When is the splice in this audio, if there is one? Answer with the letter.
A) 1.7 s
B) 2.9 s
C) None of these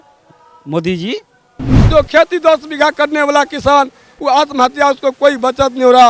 A